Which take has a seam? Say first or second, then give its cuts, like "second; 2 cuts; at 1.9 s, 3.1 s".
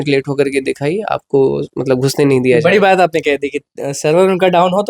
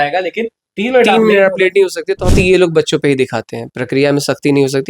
second; 1 cut; at 2.3 s